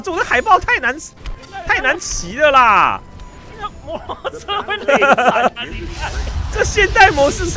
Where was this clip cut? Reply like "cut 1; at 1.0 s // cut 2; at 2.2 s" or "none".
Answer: none